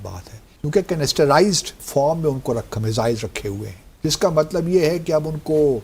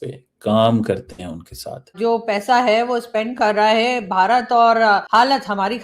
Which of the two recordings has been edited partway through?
second; 1 cut; at 1.9 s

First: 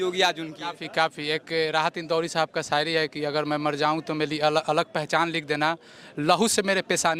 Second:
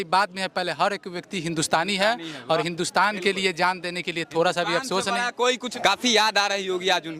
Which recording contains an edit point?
second; 1 cut; at 5.7 s

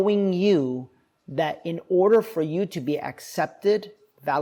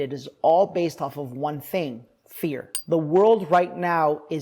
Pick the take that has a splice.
second; 1 cut; at 2.7 s

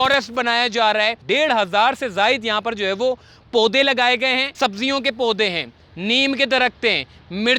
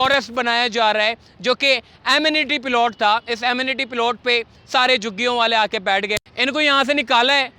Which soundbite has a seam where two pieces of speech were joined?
first; 2 cuts; at 1.2 s, 4.5 s

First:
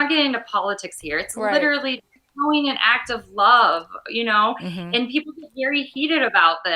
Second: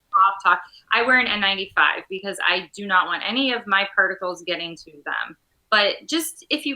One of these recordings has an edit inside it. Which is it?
second; 1 cut; at 5.5 s

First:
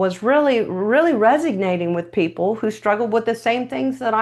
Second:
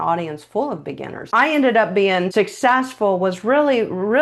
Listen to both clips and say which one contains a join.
second; 2 cuts; at 1.1 s, 2.3 s

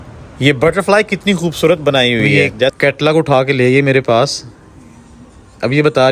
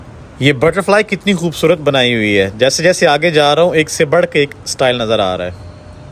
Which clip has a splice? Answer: first; 1 cut; at 2.8 s

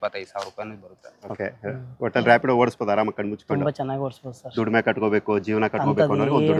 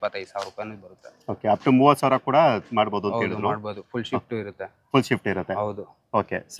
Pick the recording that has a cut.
first; 1 cut; at 1.3 s

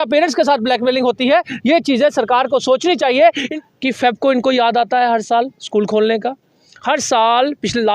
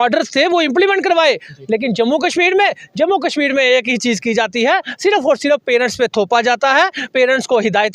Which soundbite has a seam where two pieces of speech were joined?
first; 1 cut; at 3.5 s

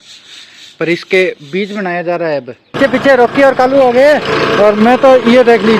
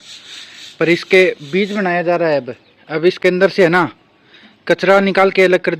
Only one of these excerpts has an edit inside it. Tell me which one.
first; 1 cut; at 2.8 s

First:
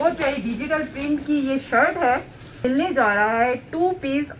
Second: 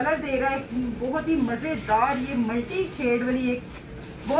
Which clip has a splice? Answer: first; 1 cut; at 2.6 s

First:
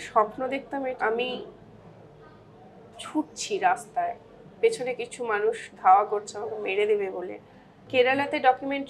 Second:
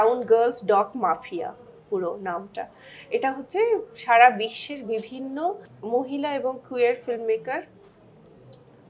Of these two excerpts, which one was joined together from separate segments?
first; 2 cuts; at 1.0 s, 7.8 s

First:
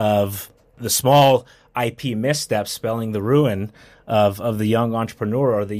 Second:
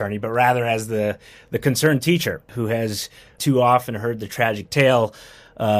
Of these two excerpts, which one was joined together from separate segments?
second; 1 cut; at 3.4 s

